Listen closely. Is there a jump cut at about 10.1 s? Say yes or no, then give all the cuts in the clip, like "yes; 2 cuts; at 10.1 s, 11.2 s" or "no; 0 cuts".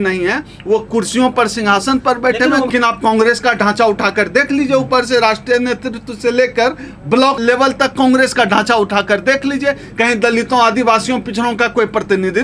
no; 2 cuts; at 2.7 s, 7.4 s